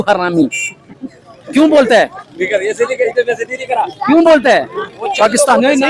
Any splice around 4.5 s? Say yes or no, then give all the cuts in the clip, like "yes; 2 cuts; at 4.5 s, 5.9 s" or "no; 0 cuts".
no; 0 cuts